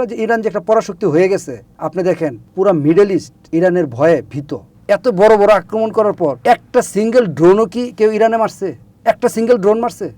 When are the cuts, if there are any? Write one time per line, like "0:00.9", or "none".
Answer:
0:02.1
0:03.4
0:04.7
0:06.4